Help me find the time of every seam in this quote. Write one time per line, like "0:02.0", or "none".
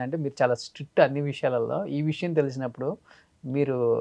none